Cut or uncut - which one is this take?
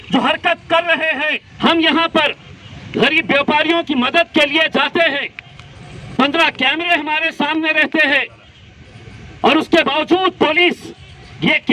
cut